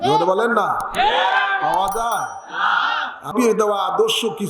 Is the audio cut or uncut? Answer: cut